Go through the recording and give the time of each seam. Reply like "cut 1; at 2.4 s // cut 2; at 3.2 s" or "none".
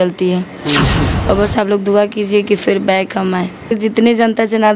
cut 1; at 1.0 s // cut 2; at 3.7 s